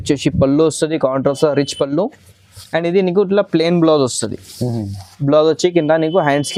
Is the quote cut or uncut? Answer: uncut